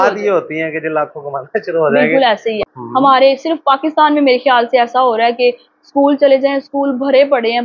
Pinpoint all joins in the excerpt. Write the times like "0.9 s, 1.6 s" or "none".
2.6 s